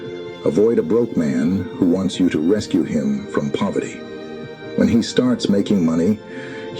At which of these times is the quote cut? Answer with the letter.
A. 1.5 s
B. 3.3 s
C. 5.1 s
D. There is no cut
C